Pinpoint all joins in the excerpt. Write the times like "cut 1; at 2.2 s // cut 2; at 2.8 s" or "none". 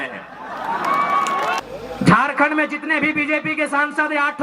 cut 1; at 1.6 s